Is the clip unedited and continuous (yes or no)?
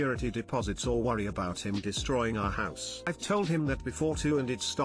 no